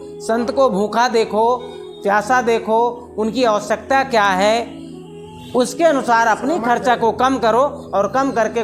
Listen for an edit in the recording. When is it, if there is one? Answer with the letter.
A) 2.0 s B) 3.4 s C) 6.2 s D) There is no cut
D